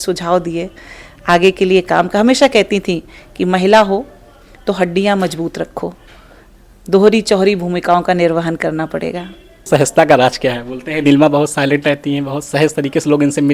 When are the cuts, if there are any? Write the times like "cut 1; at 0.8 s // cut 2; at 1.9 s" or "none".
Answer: cut 1; at 9.6 s

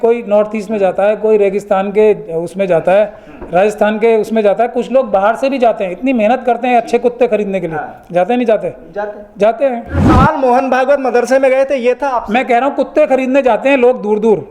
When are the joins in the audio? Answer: cut 1; at 10.1 s

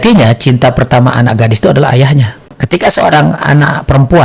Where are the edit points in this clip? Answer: cut 1; at 2.4 s

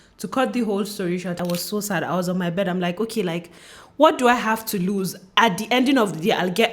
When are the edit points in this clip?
cut 1; at 1.4 s

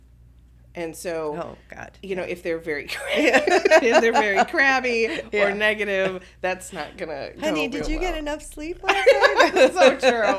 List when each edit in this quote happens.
none

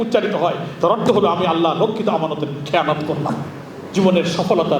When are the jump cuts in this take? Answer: cut 1; at 3.7 s

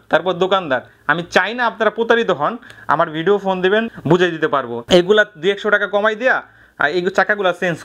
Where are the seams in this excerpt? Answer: none

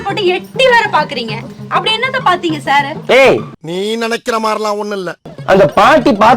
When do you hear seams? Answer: cut 1; at 5.2 s

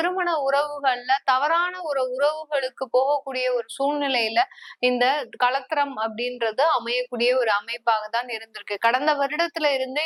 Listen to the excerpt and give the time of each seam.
none

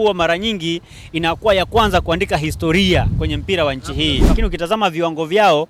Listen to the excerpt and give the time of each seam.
cut 1; at 4.4 s

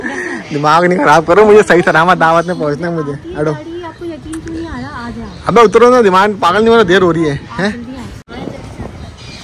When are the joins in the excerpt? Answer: none

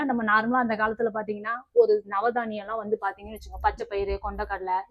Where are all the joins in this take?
none

